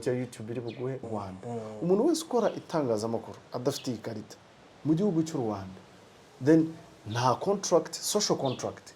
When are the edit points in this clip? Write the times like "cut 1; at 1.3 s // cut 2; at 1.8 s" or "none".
cut 1; at 1.1 s